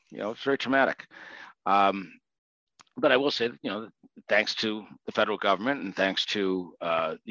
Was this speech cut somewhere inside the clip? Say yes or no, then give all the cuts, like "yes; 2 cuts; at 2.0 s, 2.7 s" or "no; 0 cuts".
no; 0 cuts